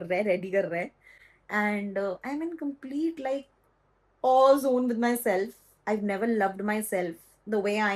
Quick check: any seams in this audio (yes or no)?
no